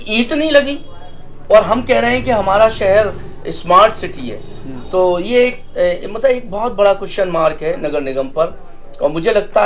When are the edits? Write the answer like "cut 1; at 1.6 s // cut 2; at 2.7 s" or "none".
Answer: none